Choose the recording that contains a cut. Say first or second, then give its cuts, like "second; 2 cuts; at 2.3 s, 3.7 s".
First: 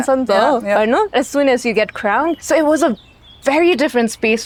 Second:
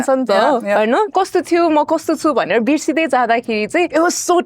second; 1 cut; at 1.1 s